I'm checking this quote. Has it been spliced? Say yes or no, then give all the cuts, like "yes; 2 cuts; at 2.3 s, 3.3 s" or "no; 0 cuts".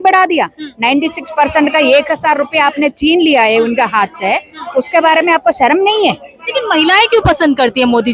no; 0 cuts